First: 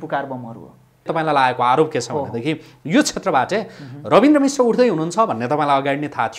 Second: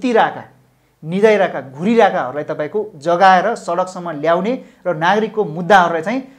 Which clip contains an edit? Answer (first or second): first